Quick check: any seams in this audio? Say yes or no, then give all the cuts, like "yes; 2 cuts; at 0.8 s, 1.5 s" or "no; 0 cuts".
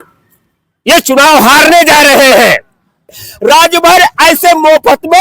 yes; 1 cut; at 3.2 s